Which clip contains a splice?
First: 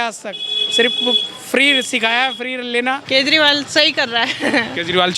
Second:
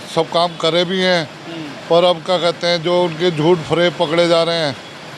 first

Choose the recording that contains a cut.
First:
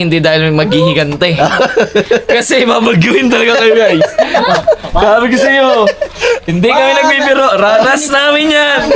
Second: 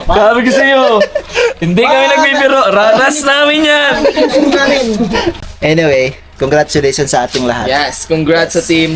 second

